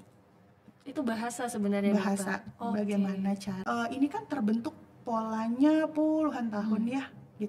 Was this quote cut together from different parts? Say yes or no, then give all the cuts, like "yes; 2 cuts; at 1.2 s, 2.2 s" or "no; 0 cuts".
yes; 1 cut; at 3.5 s